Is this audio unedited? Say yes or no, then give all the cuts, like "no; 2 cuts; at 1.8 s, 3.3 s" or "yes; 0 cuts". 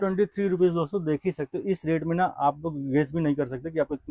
no; 1 cut; at 1.0 s